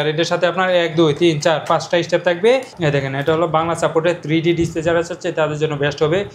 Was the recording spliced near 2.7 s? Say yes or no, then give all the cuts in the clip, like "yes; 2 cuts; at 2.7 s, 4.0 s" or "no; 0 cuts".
yes; 1 cut; at 2.7 s